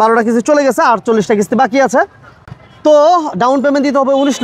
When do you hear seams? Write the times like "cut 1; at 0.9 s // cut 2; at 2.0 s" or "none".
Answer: none